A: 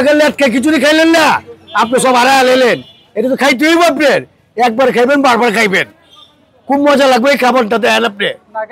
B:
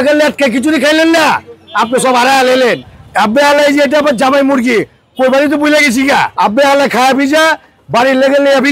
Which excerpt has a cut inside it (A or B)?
B